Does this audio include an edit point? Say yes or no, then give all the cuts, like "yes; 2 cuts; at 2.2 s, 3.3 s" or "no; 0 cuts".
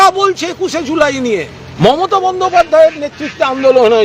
yes; 1 cut; at 1.6 s